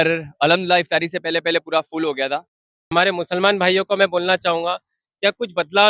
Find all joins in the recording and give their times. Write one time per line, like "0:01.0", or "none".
0:02.9